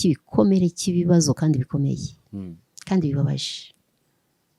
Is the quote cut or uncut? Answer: uncut